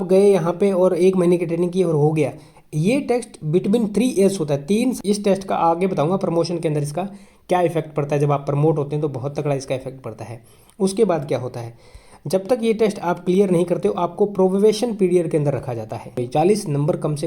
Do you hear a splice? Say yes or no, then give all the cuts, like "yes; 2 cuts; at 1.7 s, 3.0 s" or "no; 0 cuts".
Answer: yes; 2 cuts; at 5.0 s, 16.1 s